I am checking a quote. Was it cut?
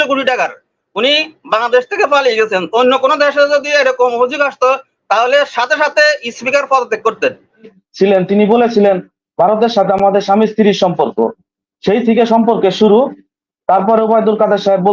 yes; 1 cut; at 7.8 s

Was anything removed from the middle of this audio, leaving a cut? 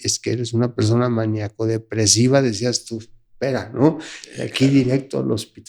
no; 0 cuts

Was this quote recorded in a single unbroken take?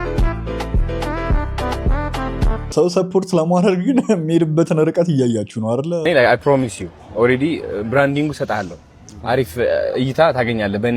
no; 2 cuts; at 2.7 s, 6.0 s

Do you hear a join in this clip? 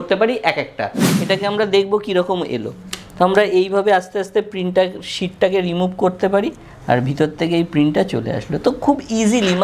yes; 1 cut; at 1.1 s

